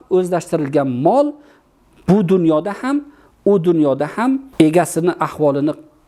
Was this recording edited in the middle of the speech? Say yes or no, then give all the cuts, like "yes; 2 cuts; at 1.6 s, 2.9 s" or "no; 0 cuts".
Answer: yes; 1 cut; at 4.5 s